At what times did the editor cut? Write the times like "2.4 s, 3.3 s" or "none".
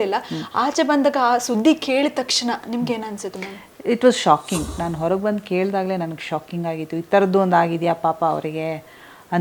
4.7 s